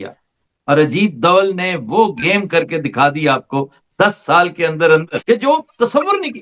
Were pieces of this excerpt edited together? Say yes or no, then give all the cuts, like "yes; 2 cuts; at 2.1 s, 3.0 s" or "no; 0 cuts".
no; 0 cuts